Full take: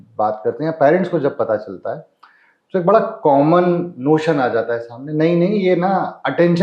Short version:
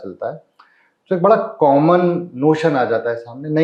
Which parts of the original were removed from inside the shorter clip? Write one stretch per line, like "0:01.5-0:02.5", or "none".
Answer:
none